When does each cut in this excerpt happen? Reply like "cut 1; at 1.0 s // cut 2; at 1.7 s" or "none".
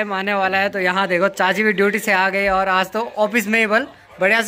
none